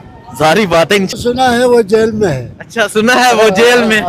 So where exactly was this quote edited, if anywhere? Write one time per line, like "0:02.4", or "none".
0:01.1